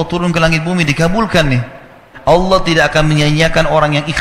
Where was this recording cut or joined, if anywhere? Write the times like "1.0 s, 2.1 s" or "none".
2.1 s